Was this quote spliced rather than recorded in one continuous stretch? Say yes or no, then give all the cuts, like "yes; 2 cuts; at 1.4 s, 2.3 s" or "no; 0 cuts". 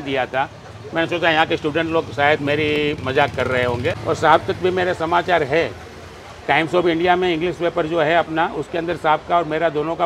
yes; 1 cut; at 4.0 s